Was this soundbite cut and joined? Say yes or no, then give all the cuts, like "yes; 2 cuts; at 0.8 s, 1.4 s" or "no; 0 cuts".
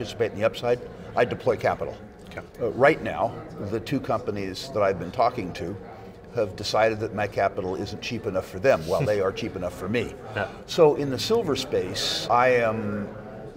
yes; 1 cut; at 12.2 s